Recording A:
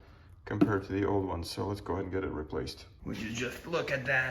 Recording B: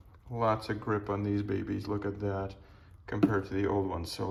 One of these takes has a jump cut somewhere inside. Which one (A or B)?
A